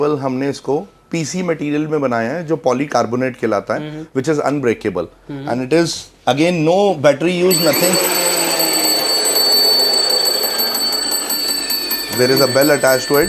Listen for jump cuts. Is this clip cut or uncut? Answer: uncut